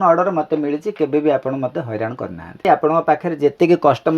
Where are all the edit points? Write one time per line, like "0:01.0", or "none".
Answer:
0:02.7